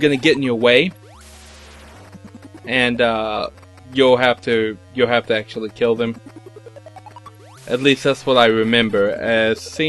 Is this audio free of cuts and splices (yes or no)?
yes